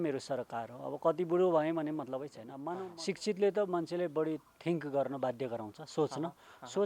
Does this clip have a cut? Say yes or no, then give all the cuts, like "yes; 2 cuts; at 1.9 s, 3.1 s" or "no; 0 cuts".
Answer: yes; 1 cut; at 2.4 s